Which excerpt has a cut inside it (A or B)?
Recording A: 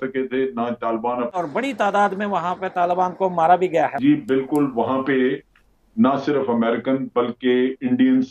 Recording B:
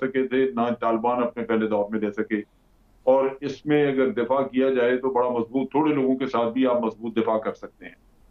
A